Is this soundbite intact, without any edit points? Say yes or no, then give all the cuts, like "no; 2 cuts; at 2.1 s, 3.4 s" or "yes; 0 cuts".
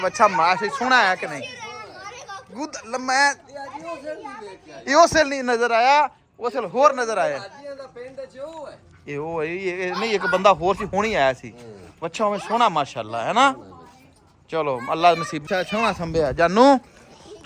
no; 1 cut; at 15.4 s